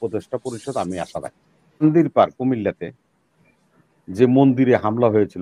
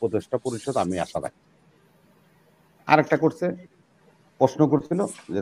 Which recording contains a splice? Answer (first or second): first